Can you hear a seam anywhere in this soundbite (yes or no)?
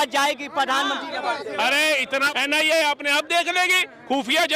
yes